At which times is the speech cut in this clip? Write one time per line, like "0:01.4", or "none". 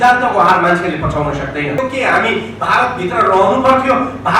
0:01.8

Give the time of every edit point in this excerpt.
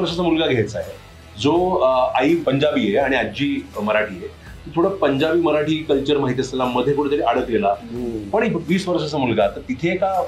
0:02.4

